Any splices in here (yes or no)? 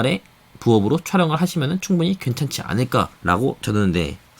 yes